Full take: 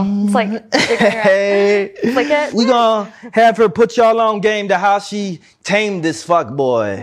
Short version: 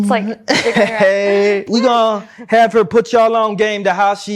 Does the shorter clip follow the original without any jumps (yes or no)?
no